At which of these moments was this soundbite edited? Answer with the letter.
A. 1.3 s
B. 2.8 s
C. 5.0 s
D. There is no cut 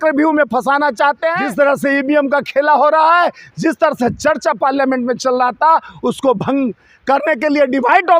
A